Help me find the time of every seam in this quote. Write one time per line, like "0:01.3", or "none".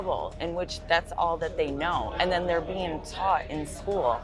none